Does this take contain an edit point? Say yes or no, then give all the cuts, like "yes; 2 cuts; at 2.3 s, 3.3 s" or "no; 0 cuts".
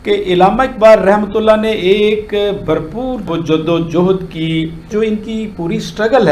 yes; 1 cut; at 4.8 s